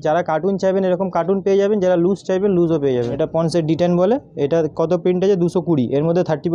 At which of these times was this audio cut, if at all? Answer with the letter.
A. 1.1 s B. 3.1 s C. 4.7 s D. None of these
B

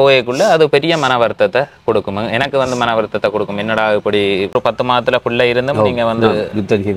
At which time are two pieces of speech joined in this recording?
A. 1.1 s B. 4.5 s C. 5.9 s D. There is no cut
B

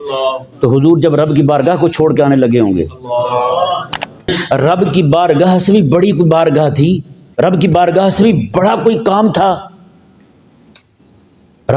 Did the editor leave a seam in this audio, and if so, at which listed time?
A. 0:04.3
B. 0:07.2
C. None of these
A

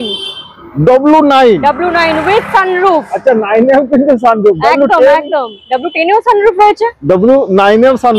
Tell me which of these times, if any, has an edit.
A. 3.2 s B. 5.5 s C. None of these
C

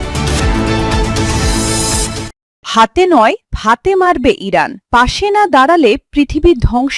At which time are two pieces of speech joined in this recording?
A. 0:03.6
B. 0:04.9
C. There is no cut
C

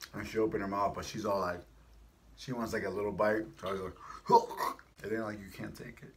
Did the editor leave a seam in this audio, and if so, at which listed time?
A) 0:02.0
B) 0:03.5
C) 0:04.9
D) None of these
C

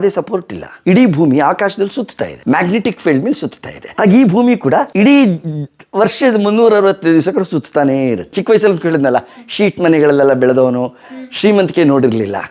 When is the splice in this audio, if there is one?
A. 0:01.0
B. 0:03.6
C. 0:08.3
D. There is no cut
C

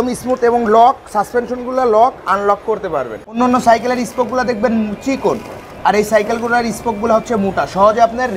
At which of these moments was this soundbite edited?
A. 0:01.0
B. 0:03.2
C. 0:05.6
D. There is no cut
B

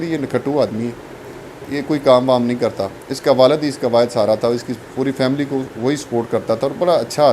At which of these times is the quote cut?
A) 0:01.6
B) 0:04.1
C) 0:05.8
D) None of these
A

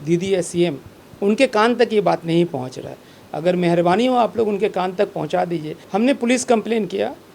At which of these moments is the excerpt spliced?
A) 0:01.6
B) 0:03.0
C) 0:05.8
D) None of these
C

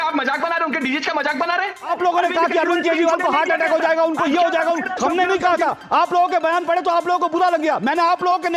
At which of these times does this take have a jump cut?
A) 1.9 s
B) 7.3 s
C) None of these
A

